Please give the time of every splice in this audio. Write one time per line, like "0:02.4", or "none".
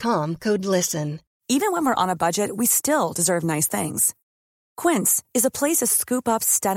0:01.3